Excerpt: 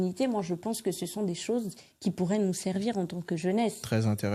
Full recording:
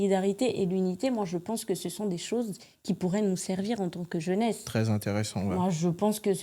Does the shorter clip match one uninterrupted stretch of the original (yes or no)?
yes